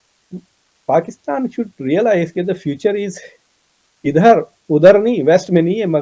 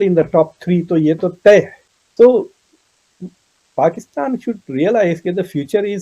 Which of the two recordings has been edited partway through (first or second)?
second